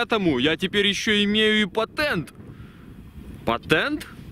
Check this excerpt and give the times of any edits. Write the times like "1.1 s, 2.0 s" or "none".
none